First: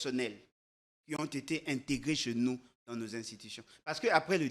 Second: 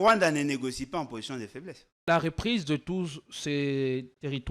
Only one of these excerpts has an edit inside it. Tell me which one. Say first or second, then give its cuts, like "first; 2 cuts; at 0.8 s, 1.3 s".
second; 1 cut; at 1.9 s